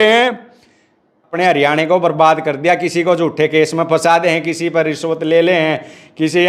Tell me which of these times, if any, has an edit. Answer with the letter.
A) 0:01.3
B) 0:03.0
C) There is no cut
A